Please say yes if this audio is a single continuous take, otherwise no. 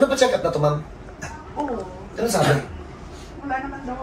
yes